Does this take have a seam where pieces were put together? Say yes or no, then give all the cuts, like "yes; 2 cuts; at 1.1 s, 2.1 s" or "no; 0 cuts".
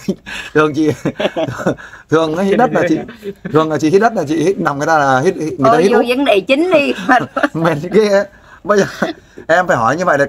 no; 0 cuts